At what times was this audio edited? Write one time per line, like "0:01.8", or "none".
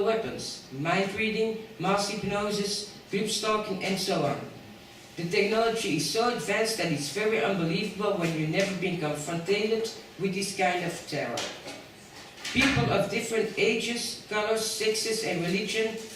0:08.2